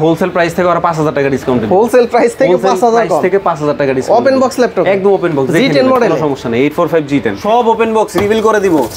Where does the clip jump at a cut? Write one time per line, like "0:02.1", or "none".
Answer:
0:07.4